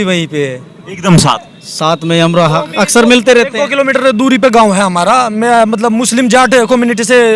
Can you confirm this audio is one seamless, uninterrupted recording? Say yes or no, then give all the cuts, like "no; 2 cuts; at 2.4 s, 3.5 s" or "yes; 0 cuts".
yes; 0 cuts